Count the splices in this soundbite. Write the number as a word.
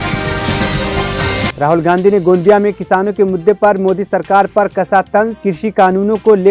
one